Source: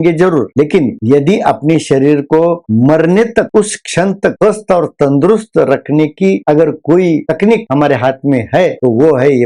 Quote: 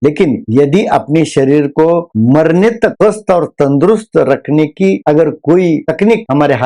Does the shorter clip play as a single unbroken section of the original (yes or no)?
no